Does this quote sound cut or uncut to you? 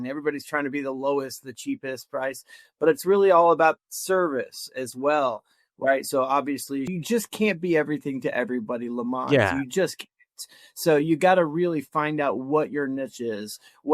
cut